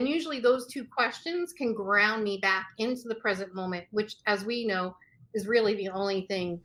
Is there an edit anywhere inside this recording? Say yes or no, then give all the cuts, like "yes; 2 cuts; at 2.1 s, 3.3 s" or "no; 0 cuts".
no; 0 cuts